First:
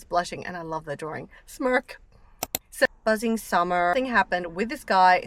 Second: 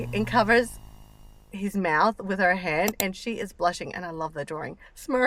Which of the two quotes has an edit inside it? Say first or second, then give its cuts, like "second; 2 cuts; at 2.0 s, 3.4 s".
first; 2 cuts; at 2.8 s, 3.9 s